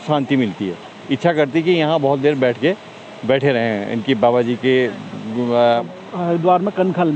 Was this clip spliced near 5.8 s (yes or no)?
yes